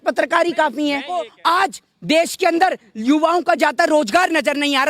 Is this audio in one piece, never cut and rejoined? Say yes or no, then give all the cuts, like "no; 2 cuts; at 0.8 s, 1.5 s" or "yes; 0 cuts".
no; 1 cut; at 1.3 s